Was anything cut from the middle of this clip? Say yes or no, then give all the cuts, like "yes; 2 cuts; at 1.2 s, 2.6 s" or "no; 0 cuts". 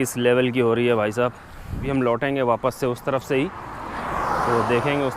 yes; 1 cut; at 1.8 s